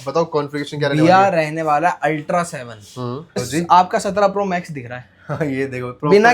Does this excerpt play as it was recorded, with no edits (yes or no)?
no